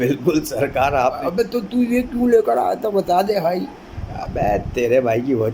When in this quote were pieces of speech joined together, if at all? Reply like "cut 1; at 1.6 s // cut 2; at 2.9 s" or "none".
cut 1; at 1.0 s // cut 2; at 4.1 s